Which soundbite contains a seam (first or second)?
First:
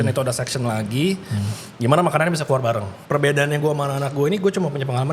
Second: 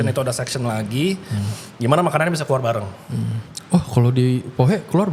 first